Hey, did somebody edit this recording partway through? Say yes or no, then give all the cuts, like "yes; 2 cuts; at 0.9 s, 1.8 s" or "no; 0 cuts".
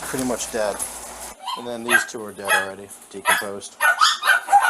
yes; 1 cut; at 1.2 s